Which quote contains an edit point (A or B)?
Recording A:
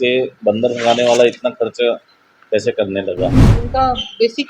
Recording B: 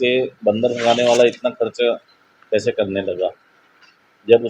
A